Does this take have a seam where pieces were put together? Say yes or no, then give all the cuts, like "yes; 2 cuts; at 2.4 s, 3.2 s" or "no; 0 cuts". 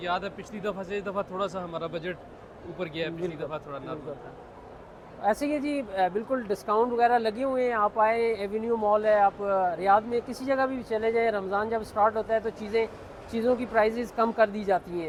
no; 0 cuts